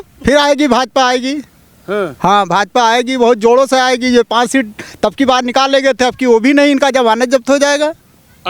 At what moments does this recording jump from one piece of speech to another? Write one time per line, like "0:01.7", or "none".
none